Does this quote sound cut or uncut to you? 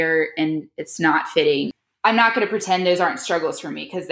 cut